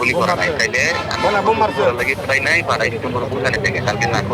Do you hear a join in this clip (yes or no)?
no